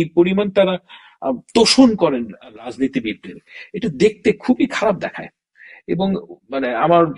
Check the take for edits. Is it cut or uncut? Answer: uncut